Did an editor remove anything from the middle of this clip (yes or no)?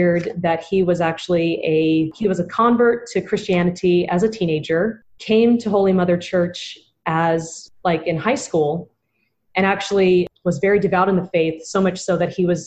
yes